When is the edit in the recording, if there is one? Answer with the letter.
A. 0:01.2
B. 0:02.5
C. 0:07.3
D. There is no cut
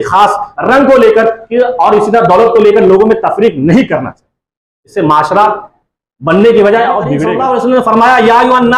C